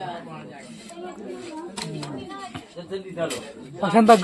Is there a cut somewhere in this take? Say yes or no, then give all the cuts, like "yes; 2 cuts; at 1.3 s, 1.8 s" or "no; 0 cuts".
no; 0 cuts